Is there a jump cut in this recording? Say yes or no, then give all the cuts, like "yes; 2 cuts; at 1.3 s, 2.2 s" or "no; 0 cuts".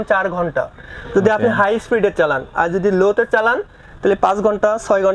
no; 0 cuts